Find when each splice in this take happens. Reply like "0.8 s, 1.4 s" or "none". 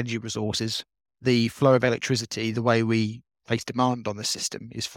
1.0 s